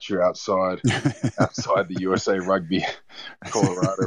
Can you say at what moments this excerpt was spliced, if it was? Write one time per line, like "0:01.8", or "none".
none